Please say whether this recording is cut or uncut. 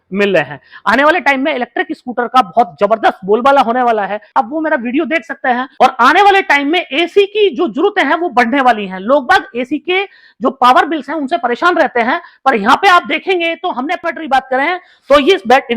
cut